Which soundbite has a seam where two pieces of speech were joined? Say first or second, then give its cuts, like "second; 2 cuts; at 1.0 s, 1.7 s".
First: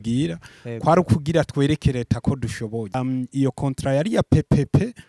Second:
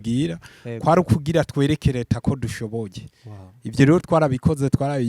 first; 1 cut; at 2.9 s